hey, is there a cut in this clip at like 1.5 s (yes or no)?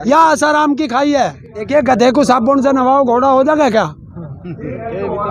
yes